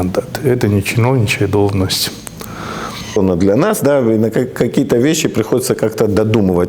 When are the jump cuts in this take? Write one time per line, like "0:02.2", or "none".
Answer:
0:03.2